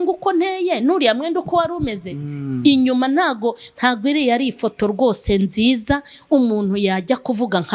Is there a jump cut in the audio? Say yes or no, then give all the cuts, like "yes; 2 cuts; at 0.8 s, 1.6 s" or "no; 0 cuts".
no; 0 cuts